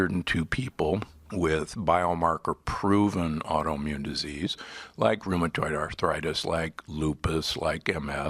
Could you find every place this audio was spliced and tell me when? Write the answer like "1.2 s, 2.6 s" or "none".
1.2 s, 5.9 s